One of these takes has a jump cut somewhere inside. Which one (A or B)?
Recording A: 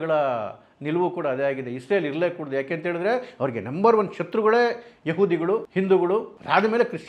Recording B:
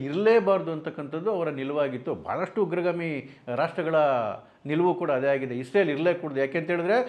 A